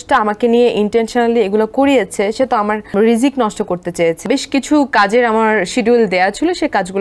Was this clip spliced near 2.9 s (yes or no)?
yes